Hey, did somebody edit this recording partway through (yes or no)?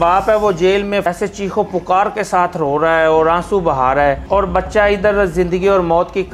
yes